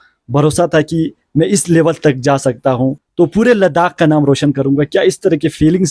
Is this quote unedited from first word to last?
no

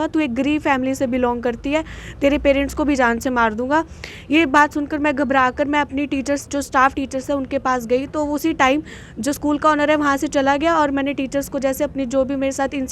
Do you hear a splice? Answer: no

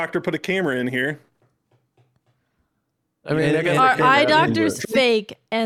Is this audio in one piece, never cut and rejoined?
yes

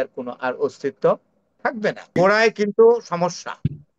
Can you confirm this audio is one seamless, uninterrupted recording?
no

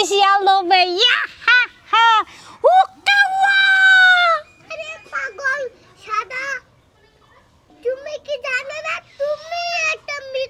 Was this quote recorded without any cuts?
yes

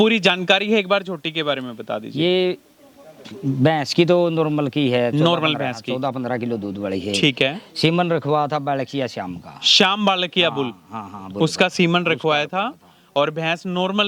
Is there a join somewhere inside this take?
no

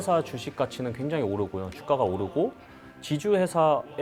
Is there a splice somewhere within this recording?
no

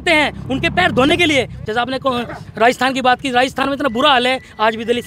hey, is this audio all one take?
no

